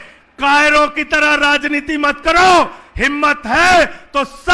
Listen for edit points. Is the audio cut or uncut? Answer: uncut